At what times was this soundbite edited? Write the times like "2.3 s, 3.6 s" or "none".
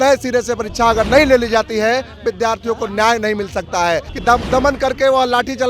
4.1 s